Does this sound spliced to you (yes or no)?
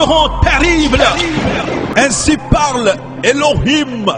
yes